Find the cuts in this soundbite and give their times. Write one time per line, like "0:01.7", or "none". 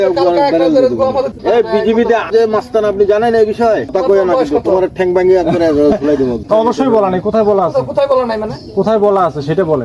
0:01.4
0:03.9
0:06.4